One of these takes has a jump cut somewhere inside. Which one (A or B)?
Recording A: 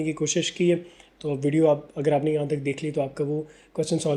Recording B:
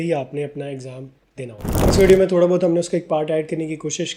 B